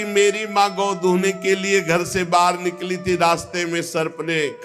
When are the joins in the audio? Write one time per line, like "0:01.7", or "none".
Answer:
none

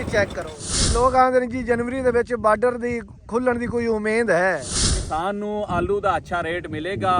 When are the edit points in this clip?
0:00.8
0:05.0

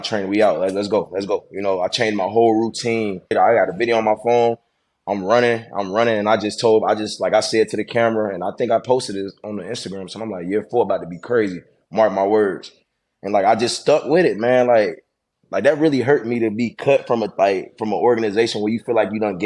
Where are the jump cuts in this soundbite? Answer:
0:03.3

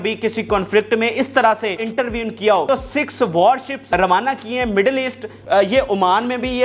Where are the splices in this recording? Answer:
0:01.8
0:02.7
0:03.8
0:05.3

